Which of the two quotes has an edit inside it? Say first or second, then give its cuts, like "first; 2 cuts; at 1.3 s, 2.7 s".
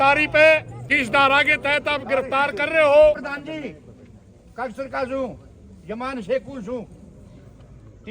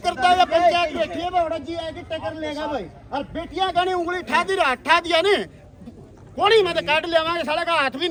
first; 2 cuts; at 0.8 s, 3.2 s